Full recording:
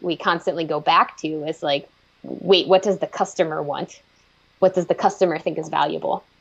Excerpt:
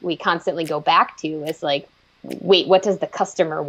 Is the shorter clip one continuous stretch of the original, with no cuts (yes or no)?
yes